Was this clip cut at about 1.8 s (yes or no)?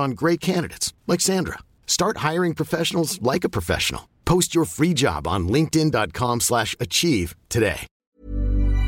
no